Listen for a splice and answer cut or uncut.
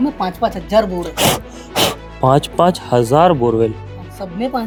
uncut